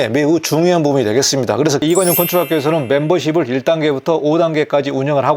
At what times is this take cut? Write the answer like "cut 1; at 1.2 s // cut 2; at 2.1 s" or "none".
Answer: cut 1; at 1.8 s